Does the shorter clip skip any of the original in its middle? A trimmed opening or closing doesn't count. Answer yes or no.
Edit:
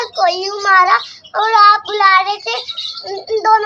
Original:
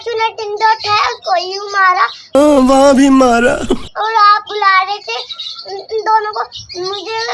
yes